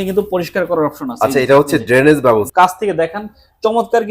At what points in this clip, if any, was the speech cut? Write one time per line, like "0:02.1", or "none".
0:02.5